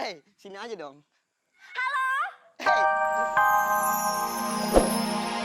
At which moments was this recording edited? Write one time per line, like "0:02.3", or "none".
0:02.6